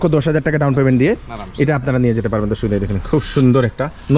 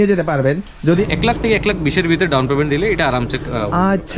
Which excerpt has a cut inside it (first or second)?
second